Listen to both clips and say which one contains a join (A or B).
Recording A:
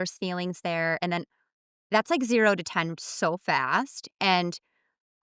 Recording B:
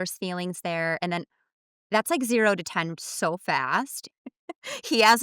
B